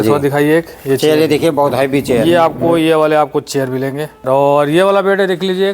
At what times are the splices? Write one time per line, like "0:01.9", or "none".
0:04.2